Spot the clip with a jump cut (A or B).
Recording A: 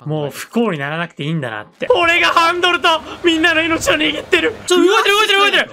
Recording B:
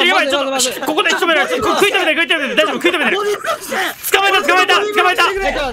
A